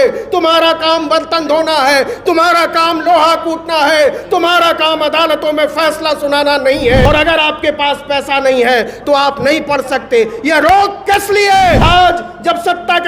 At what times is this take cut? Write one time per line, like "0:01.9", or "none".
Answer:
0:07.1
0:11.8